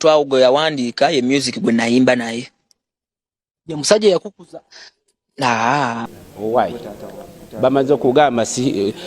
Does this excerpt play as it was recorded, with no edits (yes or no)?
no